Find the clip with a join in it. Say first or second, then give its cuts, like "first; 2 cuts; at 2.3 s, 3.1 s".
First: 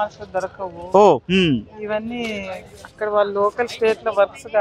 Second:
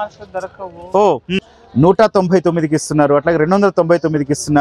second; 1 cut; at 1.4 s